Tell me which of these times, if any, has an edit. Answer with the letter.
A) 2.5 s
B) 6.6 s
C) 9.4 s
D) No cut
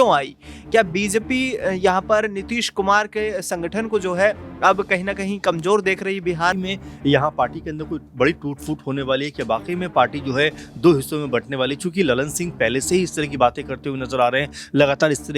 B